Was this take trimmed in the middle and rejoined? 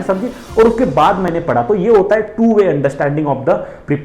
no; 0 cuts

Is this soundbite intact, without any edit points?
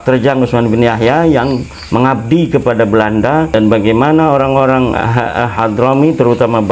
no; 1 cut; at 3.5 s

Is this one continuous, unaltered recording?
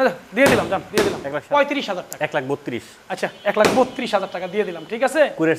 no; 1 cut; at 1.3 s

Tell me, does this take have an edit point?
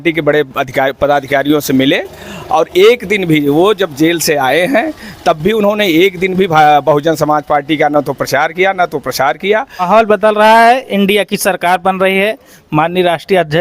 yes; 1 cut; at 9.8 s

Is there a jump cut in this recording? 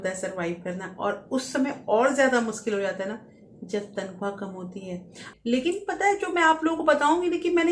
yes; 1 cut; at 5.3 s

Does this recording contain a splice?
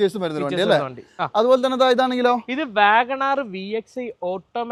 no; 0 cuts

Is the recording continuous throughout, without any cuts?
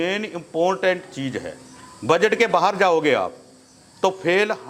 yes; 0 cuts

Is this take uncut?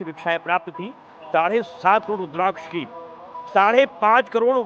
yes; 0 cuts

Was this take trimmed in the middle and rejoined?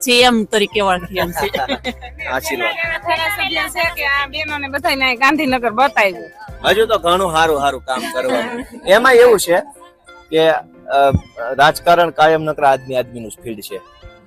no; 0 cuts

